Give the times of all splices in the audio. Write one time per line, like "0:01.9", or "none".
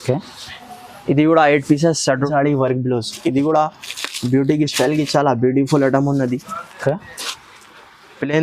0:02.3